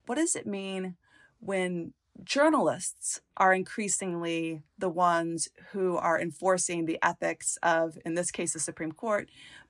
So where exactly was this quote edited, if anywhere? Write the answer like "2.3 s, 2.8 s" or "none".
none